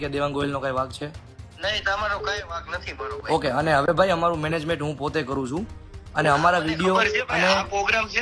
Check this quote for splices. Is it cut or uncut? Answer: uncut